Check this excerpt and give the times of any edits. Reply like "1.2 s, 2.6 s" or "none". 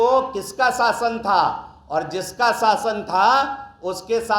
none